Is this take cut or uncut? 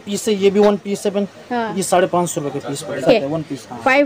uncut